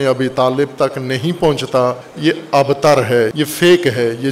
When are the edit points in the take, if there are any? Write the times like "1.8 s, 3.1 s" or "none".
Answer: 2.1 s, 3.3 s